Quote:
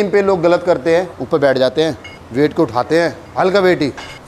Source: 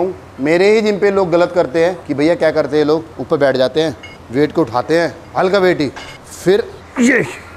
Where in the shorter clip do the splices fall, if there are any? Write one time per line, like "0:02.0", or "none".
0:01.1